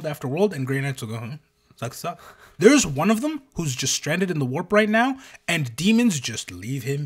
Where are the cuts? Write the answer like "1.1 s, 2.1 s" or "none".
2.4 s